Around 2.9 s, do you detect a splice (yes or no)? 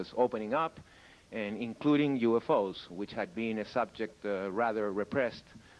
yes